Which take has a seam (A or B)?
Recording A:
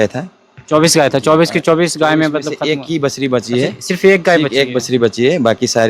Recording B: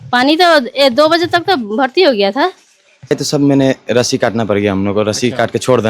B